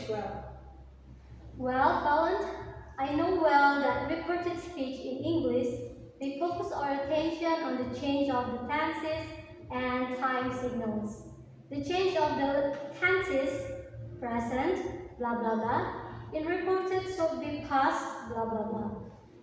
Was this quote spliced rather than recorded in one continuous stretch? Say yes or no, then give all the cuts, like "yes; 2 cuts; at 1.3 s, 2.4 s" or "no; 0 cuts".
no; 0 cuts